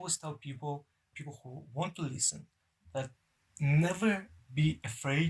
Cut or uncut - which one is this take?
cut